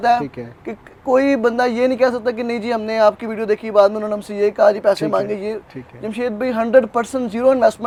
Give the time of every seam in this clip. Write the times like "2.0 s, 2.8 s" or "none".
none